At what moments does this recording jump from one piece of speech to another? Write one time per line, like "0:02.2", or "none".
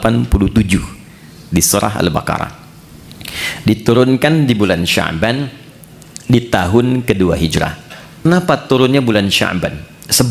0:08.3